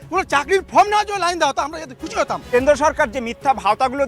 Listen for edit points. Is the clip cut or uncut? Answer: cut